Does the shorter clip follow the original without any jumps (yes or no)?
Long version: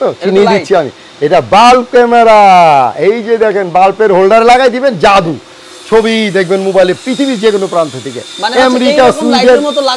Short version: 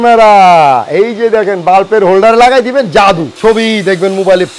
no